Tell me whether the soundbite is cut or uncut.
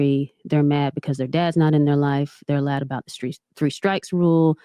uncut